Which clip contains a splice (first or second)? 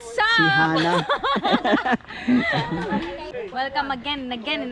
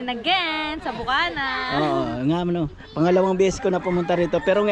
first